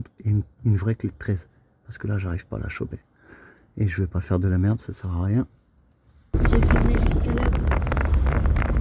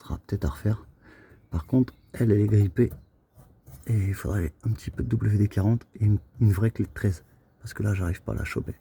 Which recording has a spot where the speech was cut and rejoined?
first; 1 cut; at 6.3 s

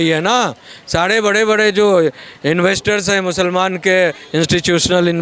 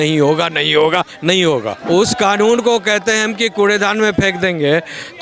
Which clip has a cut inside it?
second; 1 cut; at 1.8 s

